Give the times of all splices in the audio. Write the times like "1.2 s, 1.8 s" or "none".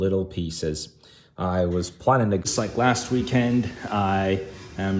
2.4 s